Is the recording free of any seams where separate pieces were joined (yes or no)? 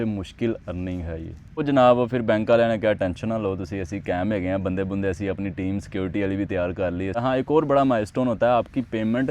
no